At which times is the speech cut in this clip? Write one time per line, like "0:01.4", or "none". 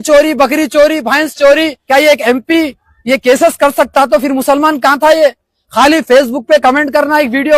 0:01.7